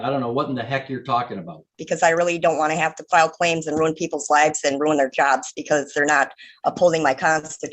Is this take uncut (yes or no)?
no